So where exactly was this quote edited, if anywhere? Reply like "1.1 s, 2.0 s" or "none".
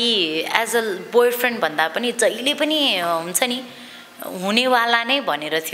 none